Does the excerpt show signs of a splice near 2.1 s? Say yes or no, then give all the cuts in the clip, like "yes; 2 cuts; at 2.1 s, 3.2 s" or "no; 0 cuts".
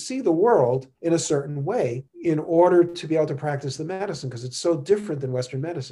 yes; 2 cuts; at 0.9 s, 2.1 s